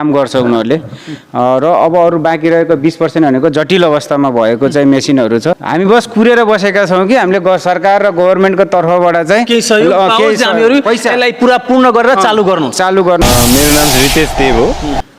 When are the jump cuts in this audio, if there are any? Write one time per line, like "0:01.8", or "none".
0:05.6
0:13.2